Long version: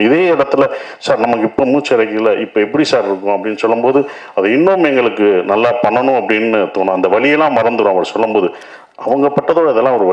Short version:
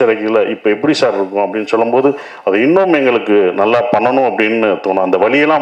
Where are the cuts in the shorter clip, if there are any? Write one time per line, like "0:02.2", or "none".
none

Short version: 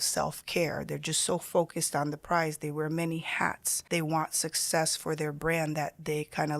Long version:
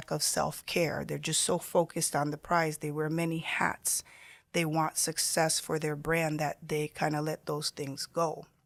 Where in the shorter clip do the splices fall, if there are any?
0:03.7

